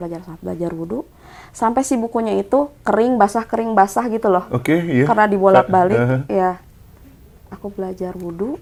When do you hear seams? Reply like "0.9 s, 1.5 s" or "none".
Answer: none